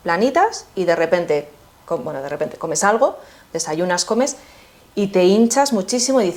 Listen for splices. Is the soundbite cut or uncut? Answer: uncut